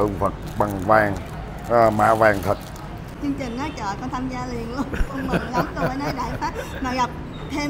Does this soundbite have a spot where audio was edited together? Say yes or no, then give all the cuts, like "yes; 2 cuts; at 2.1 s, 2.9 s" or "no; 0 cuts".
yes; 1 cut; at 3.1 s